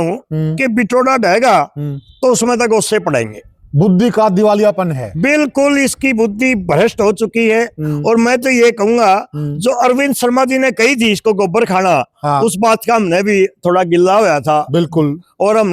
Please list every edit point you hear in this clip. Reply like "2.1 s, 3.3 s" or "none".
none